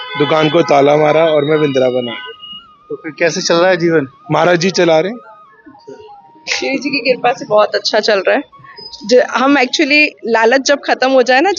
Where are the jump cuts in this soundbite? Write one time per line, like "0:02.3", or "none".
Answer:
none

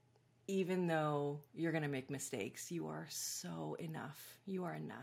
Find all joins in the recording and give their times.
none

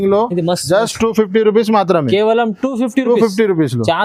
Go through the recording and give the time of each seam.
none

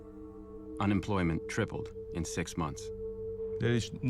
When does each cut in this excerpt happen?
0:03.0

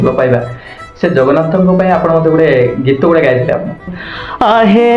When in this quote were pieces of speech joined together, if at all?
0:03.9

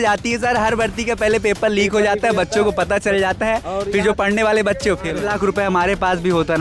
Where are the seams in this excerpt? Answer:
0:05.1

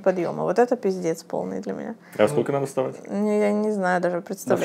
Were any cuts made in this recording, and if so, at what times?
none

